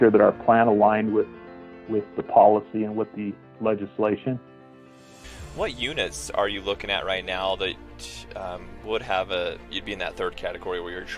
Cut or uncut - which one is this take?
cut